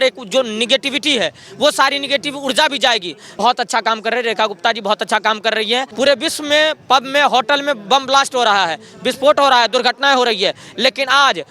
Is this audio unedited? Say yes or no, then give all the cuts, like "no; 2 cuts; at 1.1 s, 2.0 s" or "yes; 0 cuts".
no; 2 cuts; at 3.2 s, 5.9 s